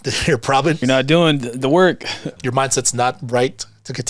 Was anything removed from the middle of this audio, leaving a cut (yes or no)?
yes